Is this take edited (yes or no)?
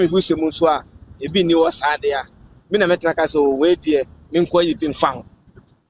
no